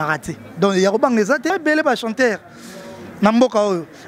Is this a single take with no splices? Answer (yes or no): no